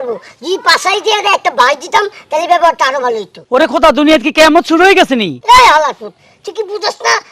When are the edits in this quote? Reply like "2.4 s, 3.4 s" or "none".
3.3 s, 5.3 s